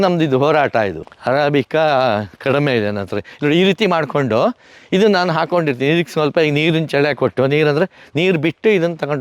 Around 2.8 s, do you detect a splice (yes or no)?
no